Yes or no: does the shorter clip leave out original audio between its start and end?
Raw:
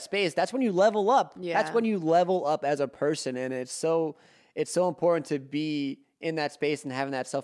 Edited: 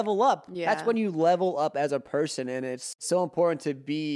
yes